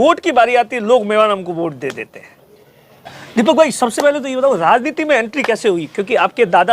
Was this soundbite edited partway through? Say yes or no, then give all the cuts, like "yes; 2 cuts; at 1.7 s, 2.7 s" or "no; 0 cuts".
yes; 1 cut; at 3.2 s